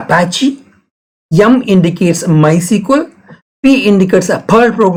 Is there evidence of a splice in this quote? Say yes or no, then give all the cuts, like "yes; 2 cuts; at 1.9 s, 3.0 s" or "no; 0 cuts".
no; 0 cuts